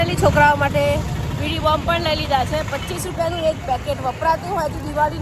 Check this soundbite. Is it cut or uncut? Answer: uncut